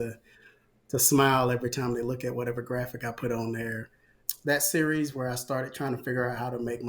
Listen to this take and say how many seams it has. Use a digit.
1